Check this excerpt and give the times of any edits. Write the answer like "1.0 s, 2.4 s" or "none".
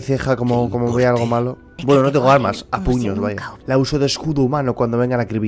1.7 s, 3.5 s

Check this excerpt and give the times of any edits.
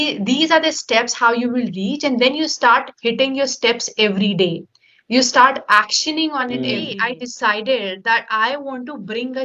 6.8 s

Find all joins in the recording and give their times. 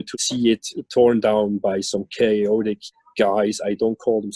none

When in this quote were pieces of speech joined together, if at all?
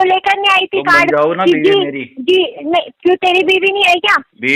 none

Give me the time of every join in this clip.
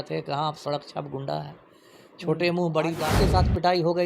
3.1 s

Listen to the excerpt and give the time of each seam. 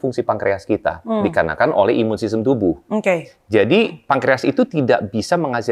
none

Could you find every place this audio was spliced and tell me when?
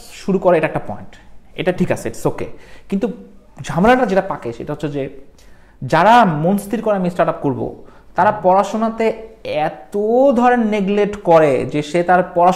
none

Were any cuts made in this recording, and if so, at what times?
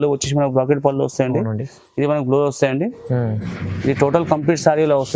none

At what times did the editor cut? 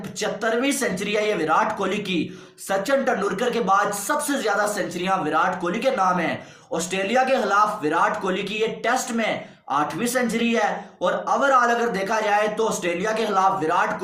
none

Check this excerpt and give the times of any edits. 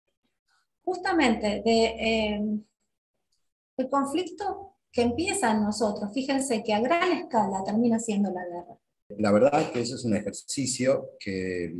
9.1 s

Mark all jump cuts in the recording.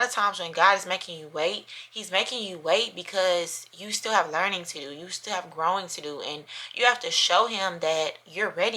none

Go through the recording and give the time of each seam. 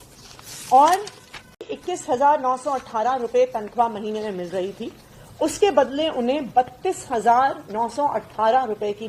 1.6 s

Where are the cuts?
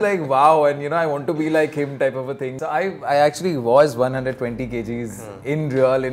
2.6 s

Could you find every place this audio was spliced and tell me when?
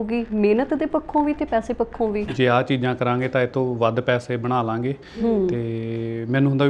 2.3 s

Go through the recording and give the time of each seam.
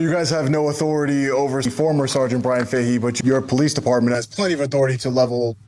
1.7 s, 3.2 s

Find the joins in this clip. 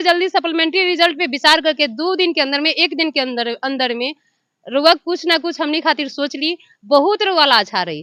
none

